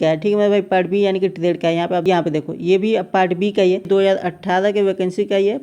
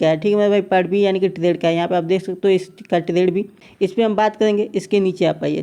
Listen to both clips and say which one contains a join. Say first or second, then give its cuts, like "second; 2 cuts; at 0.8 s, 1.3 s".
first; 2 cuts; at 2.0 s, 3.9 s